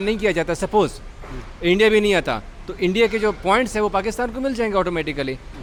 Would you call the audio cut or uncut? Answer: uncut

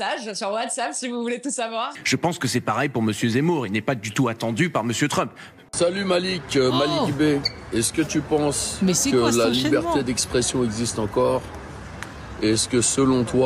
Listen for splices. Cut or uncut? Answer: cut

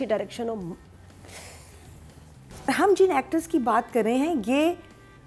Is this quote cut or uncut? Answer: cut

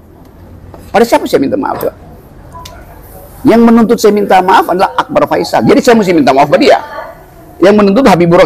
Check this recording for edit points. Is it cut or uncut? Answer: uncut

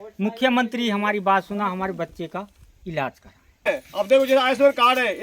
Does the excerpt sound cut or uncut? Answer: cut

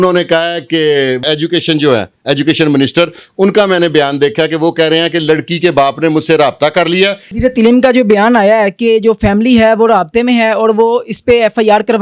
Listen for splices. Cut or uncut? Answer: cut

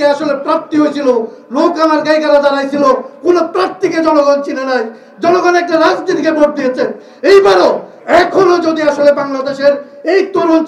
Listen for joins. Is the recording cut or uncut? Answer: uncut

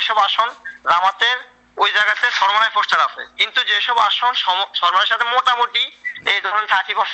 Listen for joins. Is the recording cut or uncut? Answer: uncut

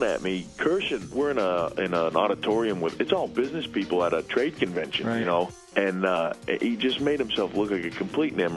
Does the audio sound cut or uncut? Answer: cut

